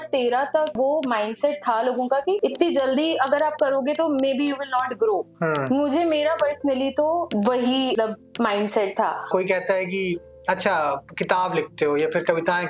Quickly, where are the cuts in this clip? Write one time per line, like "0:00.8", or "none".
0:00.8
0:09.2